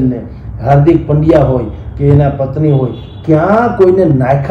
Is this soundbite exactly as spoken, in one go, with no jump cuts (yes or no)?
yes